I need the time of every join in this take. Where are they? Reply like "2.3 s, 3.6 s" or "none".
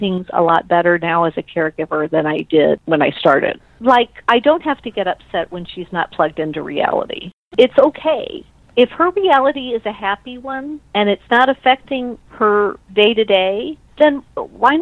3.7 s, 7.4 s, 10.8 s